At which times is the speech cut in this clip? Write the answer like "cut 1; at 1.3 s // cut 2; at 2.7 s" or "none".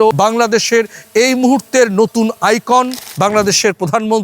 cut 1; at 3.1 s